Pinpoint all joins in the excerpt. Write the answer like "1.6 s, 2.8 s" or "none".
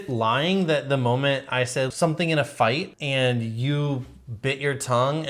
1.9 s, 2.9 s